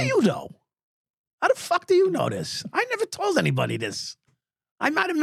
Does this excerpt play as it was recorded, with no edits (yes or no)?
yes